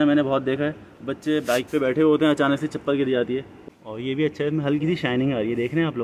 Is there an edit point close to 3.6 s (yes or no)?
yes